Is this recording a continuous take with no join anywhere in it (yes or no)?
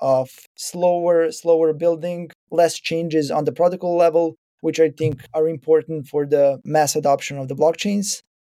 no